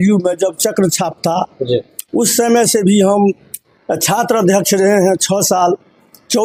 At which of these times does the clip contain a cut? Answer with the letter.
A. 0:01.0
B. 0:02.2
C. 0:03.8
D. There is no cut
D